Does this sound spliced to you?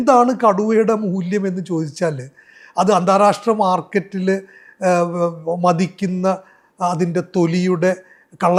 no; 0 cuts

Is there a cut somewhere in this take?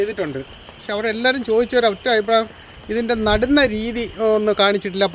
no; 0 cuts

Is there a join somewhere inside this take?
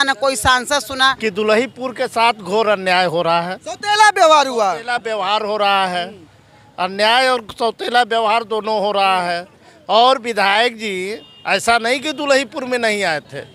no; 0 cuts

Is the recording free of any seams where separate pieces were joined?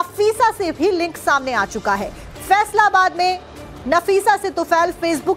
no; 1 cut; at 2.8 s

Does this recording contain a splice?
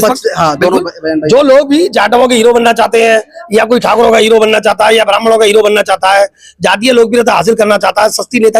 no; 0 cuts

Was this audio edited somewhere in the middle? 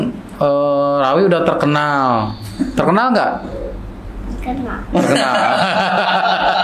no; 0 cuts

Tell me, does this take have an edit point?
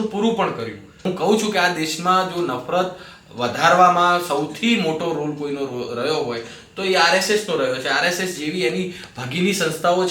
yes; 1 cut; at 1.0 s

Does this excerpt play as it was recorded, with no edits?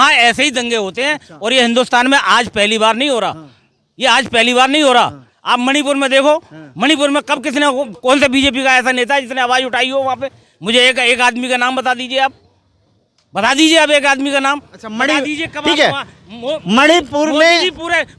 yes; 0 cuts

